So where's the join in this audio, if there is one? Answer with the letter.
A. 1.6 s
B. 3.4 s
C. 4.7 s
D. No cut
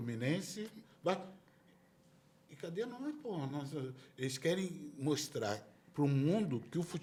D